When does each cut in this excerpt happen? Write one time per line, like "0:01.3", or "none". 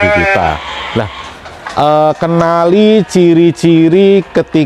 none